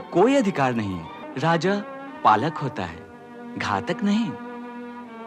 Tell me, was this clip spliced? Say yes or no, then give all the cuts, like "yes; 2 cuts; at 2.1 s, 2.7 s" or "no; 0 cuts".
yes; 1 cut; at 1.2 s